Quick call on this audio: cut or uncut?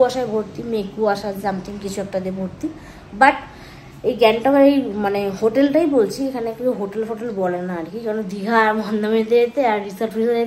uncut